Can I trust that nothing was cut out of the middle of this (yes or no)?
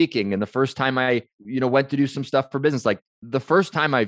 no